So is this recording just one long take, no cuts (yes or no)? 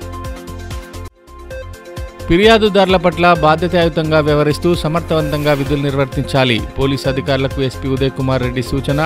no